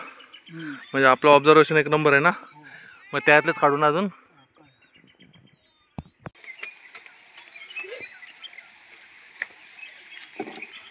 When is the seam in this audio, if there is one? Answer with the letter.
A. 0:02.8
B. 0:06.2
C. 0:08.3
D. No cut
B